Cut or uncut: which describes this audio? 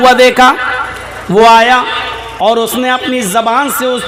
uncut